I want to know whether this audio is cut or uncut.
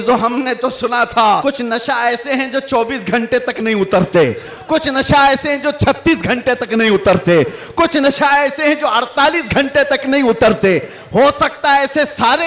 cut